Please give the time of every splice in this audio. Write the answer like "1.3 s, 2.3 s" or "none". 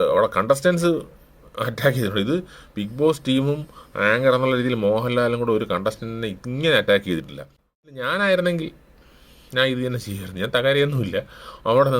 7.8 s